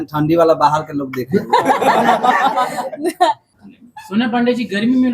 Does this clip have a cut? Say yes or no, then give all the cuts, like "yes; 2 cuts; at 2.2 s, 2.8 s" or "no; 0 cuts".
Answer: yes; 1 cut; at 3.6 s